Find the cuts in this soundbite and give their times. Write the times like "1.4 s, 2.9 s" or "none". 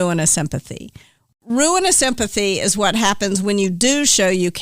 1.2 s

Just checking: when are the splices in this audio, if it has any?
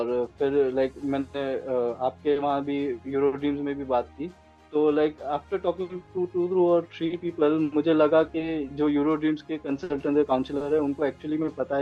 none

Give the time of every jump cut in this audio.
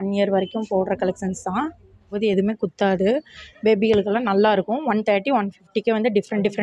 2.1 s

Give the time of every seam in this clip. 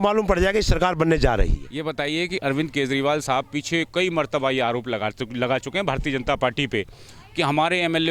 1.7 s

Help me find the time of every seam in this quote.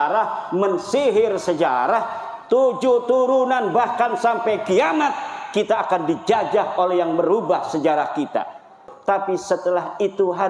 8.9 s

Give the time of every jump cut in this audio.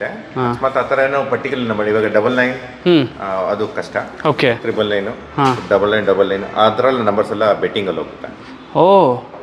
none

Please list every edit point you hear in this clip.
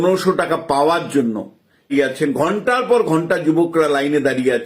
1.9 s

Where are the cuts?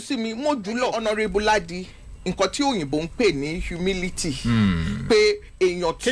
1.0 s

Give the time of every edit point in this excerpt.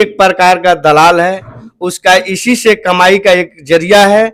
none

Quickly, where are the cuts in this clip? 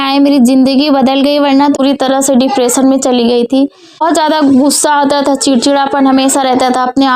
1.8 s, 4.0 s

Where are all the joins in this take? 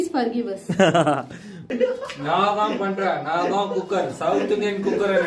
1.7 s

